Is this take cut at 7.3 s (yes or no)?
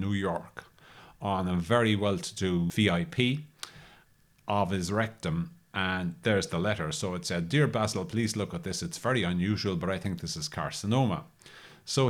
no